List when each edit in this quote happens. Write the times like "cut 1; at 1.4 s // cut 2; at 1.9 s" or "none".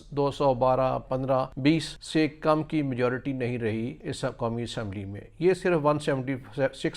cut 1; at 1.7 s // cut 2; at 4.0 s